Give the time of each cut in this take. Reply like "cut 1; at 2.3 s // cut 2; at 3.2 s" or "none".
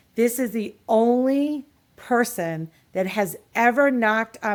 none

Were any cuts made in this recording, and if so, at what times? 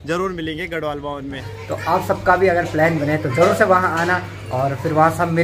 cut 1; at 1.5 s

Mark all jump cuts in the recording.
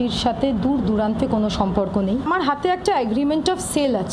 cut 1; at 2.3 s

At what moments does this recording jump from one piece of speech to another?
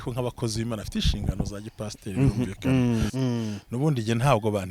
cut 1; at 3.1 s

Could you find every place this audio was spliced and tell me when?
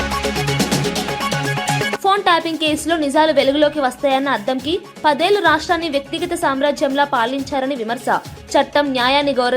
cut 1; at 2.0 s

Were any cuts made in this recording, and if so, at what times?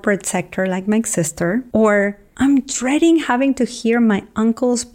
cut 1; at 1.7 s

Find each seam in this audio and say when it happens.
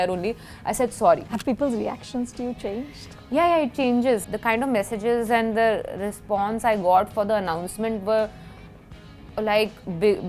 cut 1; at 1.3 s // cut 2; at 4.3 s

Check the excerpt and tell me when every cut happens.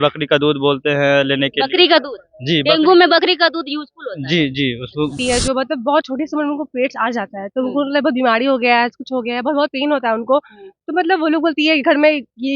cut 1; at 5.1 s

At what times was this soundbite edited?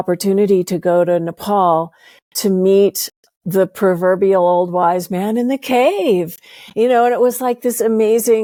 none

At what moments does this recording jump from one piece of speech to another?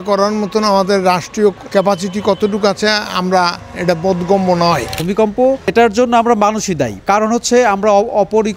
cut 1; at 5.0 s

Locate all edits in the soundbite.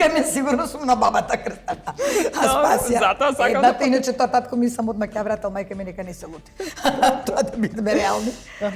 none

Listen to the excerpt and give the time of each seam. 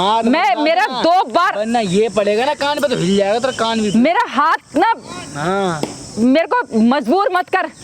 none

